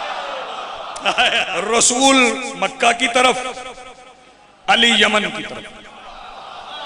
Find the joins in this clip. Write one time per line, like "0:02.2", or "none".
0:01.5